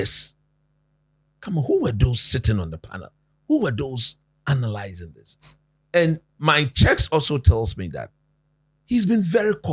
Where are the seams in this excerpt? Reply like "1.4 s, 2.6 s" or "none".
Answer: none

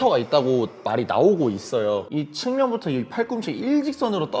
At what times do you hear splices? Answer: 2.1 s

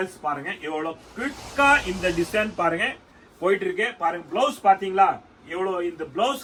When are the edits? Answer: none

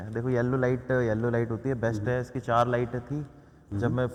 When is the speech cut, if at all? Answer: none

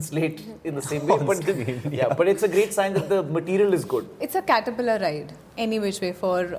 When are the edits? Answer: 4.2 s

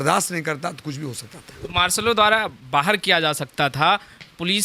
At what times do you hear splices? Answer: none

